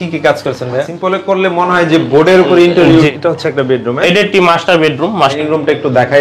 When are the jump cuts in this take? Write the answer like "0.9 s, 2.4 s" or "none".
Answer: 0.8 s, 3.1 s, 5.3 s

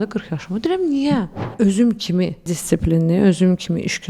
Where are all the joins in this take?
1.5 s, 2.6 s

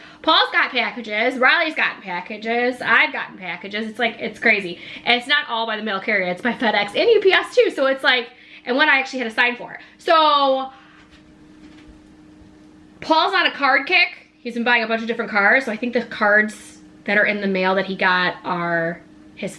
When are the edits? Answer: none

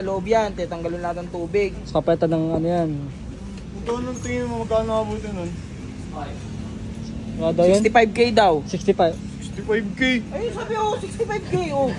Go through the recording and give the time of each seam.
none

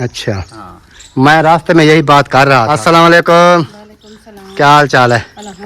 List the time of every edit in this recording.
2.7 s

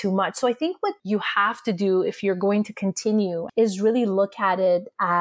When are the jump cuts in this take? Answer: 1.0 s, 3.4 s

